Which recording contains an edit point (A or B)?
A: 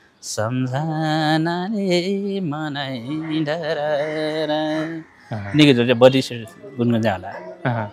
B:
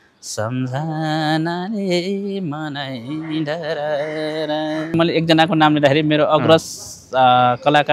B